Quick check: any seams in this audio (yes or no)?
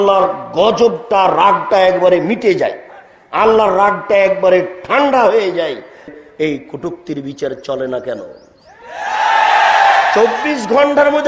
yes